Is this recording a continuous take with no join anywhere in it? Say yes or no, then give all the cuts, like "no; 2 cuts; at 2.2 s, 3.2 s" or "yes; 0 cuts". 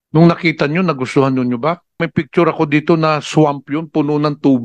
no; 1 cut; at 2.0 s